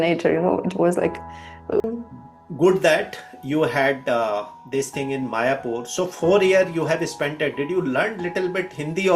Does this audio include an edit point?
yes; 1 cut; at 1.8 s

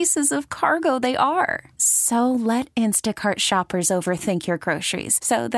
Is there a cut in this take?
no; 0 cuts

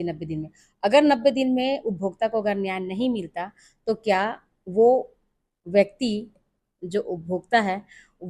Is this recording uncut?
yes; 0 cuts

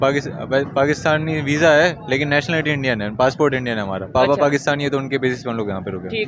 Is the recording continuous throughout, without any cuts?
yes; 0 cuts

